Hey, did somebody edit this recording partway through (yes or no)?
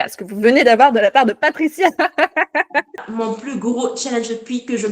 yes